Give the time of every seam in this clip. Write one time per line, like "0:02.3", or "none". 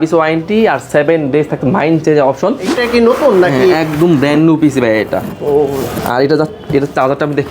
0:02.8